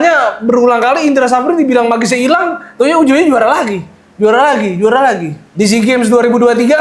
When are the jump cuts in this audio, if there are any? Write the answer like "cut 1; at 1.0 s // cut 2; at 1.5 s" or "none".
cut 1; at 5.4 s